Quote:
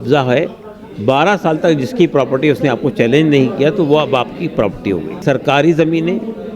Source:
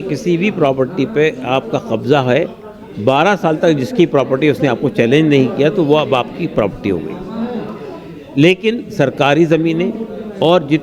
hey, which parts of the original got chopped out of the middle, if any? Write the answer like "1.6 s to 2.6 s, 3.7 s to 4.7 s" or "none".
7.1 s to 8.9 s